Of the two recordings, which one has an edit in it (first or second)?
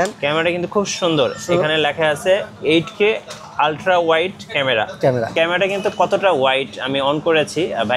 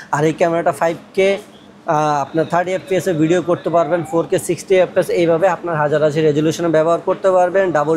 first